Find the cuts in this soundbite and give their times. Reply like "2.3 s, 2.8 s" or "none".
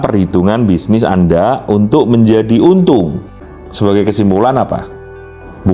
3.4 s